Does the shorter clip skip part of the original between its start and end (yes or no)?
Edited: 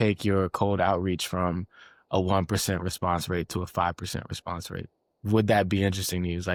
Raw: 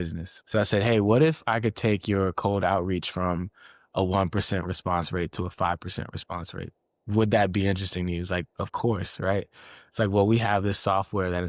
no